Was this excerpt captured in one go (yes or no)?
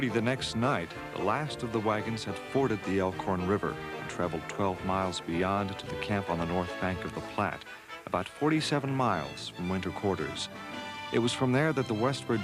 no